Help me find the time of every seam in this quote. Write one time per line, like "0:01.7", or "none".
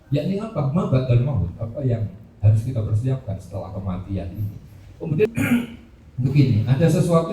0:05.3